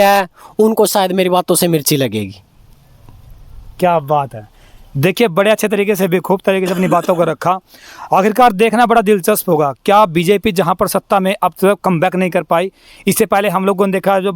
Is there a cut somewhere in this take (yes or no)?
no